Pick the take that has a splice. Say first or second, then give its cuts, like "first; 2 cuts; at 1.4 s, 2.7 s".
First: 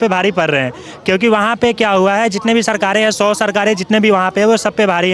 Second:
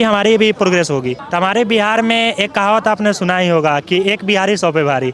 second; 1 cut; at 1.2 s